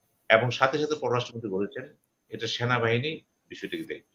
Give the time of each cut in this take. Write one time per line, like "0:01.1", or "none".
none